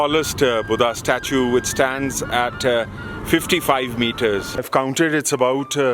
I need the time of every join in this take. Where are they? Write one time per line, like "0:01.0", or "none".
0:04.6